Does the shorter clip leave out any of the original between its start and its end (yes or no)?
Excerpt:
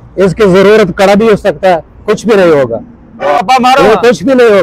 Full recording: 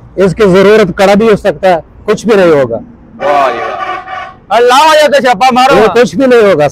yes